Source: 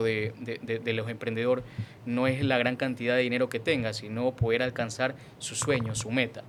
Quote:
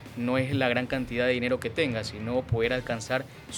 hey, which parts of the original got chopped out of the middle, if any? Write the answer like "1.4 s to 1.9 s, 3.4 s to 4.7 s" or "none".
none